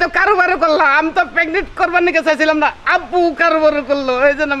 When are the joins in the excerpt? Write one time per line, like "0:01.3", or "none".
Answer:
none

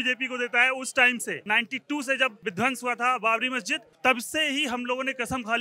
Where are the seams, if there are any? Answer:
0:01.4
0:02.4
0:03.8

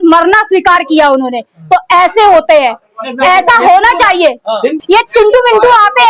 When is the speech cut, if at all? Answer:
none

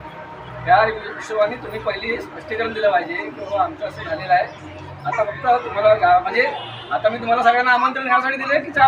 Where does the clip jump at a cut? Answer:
none

